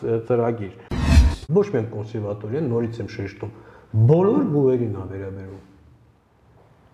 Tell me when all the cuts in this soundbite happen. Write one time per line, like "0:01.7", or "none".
0:01.1